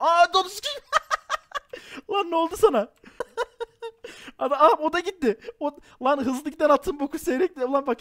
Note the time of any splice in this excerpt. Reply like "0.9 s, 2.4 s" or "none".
3.2 s